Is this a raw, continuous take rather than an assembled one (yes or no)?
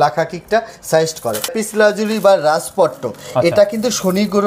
no